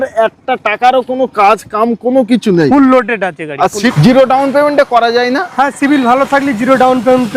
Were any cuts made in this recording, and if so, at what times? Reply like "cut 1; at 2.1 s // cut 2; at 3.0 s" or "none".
cut 1; at 4.0 s